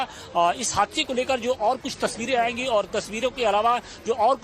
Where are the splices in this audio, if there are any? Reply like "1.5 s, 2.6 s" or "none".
2.6 s